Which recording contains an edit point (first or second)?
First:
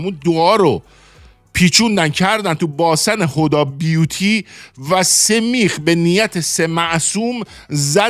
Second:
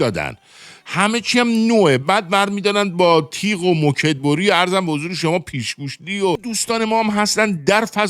second